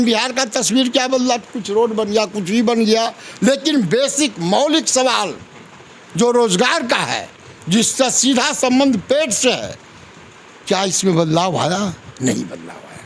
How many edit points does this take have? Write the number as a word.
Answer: zero